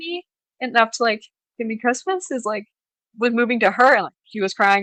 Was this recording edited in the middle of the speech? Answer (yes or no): no